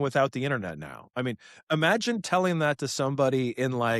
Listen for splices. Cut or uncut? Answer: uncut